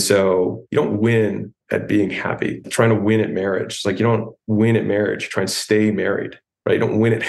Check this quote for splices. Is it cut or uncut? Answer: cut